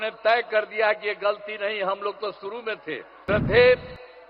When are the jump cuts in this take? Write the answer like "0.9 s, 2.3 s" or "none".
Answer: 3.1 s